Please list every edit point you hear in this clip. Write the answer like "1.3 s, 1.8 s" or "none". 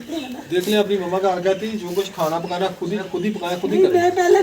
3.1 s